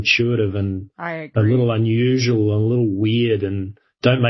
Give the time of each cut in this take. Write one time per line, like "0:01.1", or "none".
none